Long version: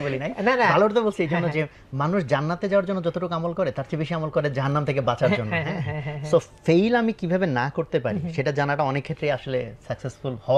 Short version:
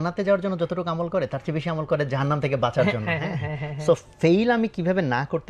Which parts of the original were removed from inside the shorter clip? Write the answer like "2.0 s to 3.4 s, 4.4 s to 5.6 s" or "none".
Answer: none